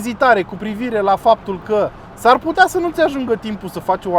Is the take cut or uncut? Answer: uncut